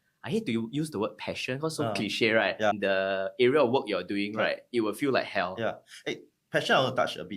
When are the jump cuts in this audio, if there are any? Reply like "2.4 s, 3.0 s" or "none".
2.7 s